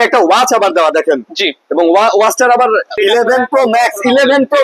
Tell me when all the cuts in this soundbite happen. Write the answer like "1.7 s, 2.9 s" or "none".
3.0 s